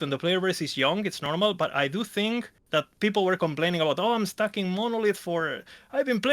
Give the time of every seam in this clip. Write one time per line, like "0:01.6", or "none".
0:02.6